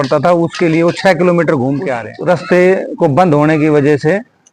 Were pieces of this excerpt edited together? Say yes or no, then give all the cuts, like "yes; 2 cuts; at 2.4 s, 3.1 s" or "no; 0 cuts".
yes; 1 cut; at 2.1 s